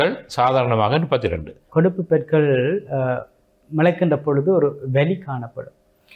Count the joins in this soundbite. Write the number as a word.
one